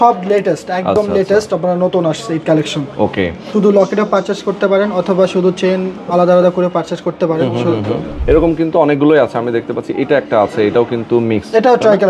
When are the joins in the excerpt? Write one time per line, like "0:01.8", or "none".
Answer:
0:03.4
0:08.1